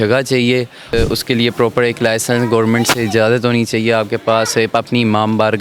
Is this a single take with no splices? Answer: no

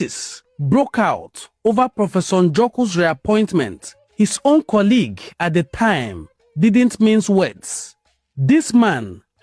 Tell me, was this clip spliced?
no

